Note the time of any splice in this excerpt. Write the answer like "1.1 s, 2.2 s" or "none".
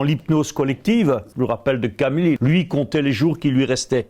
1.3 s, 2.4 s